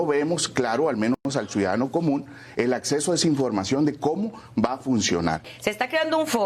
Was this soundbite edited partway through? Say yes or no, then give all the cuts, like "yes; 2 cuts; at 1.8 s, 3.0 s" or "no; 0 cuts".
yes; 1 cut; at 5.5 s